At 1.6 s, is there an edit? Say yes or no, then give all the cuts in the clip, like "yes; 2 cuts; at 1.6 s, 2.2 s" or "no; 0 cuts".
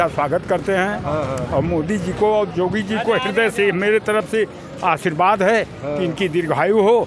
no; 0 cuts